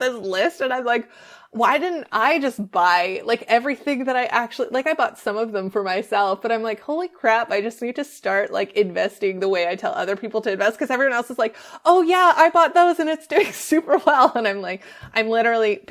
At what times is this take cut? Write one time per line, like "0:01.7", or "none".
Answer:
none